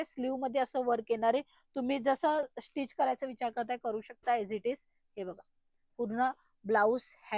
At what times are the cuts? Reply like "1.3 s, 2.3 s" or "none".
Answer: none